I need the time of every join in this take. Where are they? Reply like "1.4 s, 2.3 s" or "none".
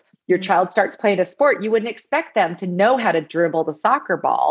none